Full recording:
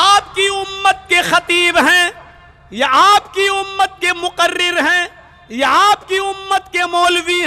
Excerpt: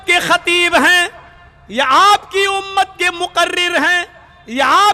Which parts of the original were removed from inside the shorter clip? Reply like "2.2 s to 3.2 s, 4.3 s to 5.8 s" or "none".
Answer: none